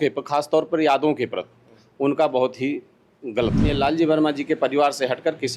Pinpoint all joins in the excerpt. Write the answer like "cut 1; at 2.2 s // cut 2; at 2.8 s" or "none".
cut 1; at 3.7 s